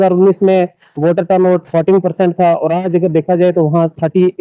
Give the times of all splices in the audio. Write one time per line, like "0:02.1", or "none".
none